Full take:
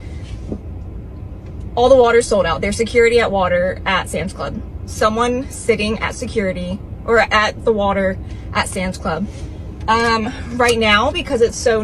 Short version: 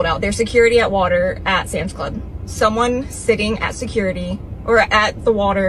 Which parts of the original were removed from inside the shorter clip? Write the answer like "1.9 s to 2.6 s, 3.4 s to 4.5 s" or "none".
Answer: none